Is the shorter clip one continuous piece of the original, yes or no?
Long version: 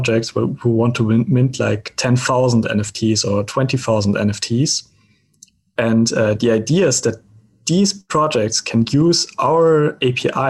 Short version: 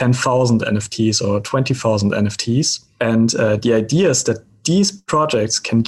no